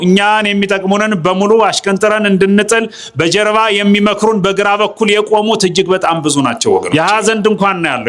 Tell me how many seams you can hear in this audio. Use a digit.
1